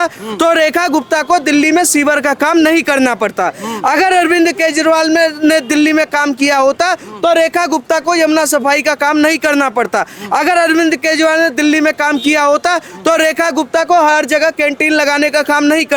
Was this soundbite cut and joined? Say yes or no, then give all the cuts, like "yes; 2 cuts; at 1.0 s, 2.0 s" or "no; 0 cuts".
no; 0 cuts